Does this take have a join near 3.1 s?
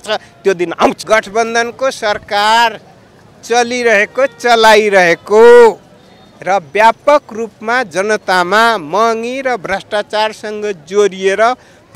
no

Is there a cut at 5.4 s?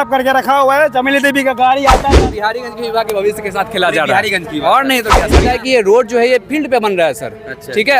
yes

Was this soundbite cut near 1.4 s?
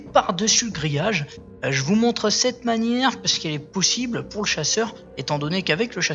yes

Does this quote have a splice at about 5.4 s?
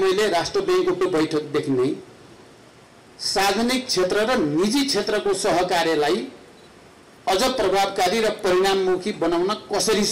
no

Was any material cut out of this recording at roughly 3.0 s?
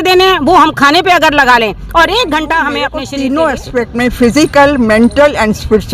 yes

